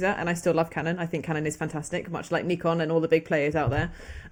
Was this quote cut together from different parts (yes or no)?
no